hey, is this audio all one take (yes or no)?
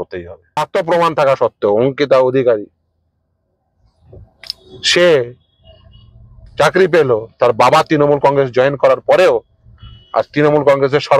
yes